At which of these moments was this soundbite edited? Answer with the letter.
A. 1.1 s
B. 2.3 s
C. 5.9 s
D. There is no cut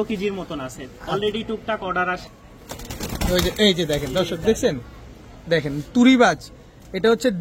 B